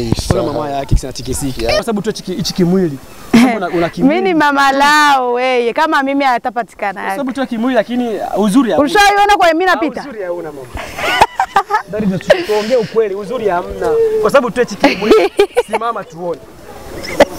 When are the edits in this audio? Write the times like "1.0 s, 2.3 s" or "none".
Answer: 1.8 s